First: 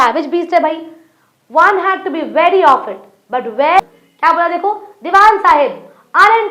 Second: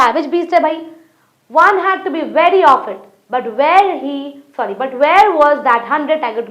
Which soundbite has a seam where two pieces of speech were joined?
first; 1 cut; at 3.8 s

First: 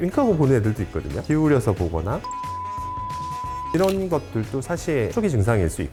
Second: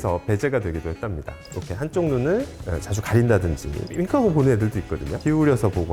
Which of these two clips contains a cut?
second; 1 cut; at 1.4 s

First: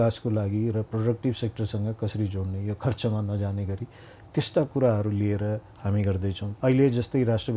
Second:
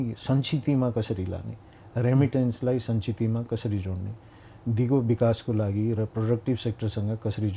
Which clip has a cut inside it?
first; 1 cut; at 6.5 s

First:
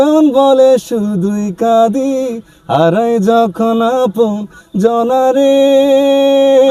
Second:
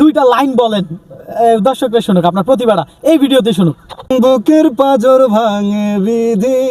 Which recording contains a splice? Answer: second; 1 cut; at 4.1 s

